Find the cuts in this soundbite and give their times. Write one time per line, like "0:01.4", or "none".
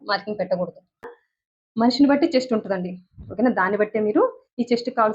0:01.2